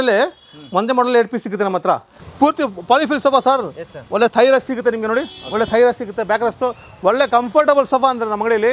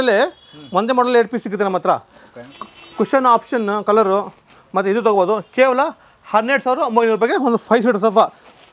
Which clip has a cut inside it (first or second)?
first